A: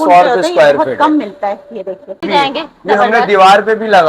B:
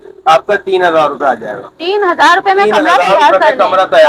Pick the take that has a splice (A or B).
A